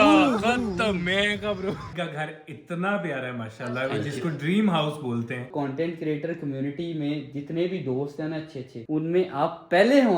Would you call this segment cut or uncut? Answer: cut